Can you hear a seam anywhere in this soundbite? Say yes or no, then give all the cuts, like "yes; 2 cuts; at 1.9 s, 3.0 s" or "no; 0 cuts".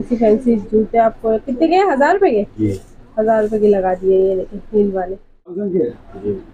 yes; 1 cut; at 5.6 s